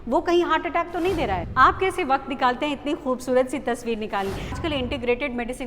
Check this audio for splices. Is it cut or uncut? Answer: cut